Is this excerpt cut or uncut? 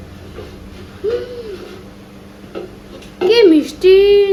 uncut